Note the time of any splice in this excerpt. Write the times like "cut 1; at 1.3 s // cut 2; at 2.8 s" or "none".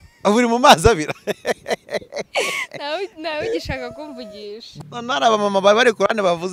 cut 1; at 4.6 s